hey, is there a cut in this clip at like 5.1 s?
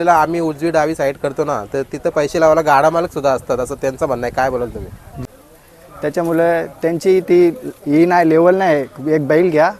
yes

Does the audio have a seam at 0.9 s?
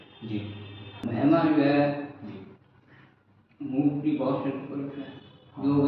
yes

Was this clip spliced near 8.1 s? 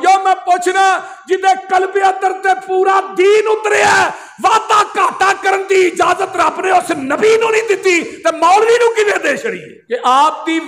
no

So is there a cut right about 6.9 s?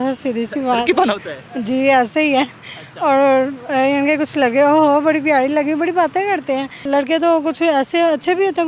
yes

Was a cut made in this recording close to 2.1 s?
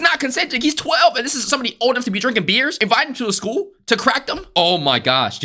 no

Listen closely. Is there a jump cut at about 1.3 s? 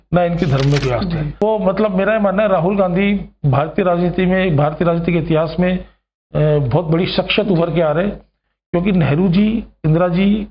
yes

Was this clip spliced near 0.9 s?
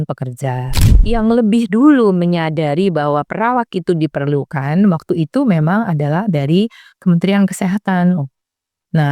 yes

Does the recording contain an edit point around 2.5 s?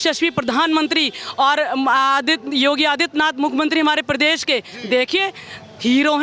no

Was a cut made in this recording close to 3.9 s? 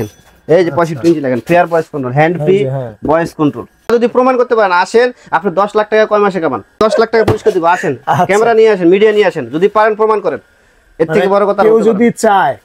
yes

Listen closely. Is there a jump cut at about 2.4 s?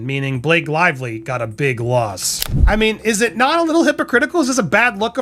yes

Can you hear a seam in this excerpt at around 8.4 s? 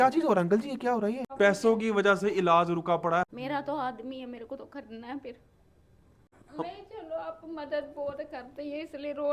no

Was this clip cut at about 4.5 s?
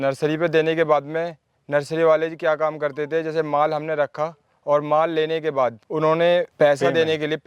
no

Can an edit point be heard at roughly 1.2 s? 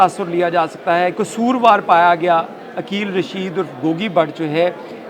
yes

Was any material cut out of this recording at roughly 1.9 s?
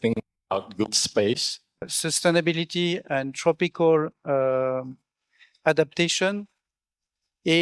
yes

